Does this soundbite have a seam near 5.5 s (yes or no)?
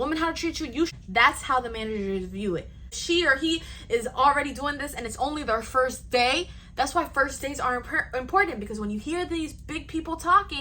no